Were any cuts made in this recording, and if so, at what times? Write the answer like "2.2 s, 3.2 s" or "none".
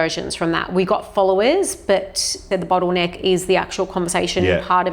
2.4 s